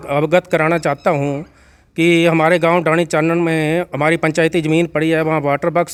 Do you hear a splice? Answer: no; 0 cuts

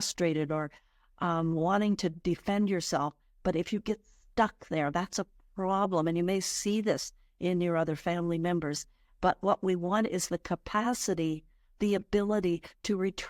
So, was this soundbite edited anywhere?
no; 0 cuts

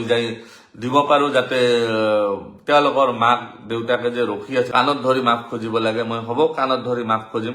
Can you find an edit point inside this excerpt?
yes; 1 cut; at 4.7 s

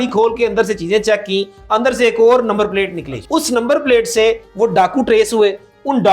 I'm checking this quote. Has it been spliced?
yes; 1 cut; at 3.1 s

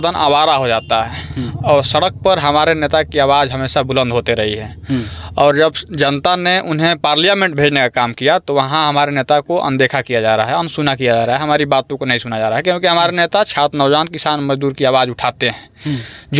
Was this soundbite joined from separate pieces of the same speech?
no; 0 cuts

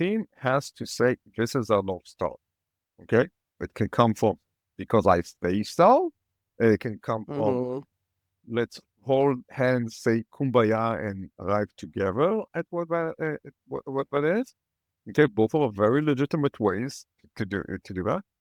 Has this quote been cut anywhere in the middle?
no; 0 cuts

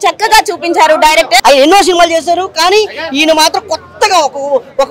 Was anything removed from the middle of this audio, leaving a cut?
yes; 1 cut; at 1.4 s

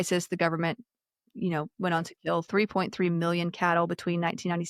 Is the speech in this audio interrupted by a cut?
no; 0 cuts

